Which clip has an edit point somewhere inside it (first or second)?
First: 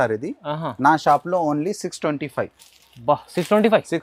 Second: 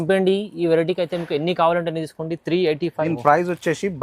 second